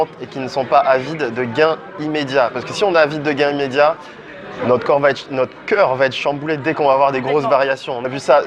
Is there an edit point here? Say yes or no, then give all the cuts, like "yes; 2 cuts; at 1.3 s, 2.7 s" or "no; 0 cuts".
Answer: no; 0 cuts